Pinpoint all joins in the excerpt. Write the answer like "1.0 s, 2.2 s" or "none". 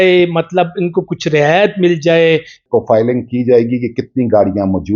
2.6 s